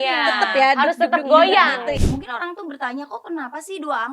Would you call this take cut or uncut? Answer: cut